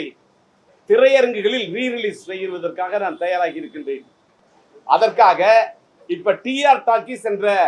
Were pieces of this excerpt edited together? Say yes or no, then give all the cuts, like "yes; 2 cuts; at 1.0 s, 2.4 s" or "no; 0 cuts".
no; 0 cuts